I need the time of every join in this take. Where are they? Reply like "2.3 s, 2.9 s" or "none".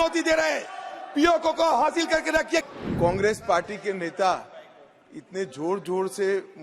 2.7 s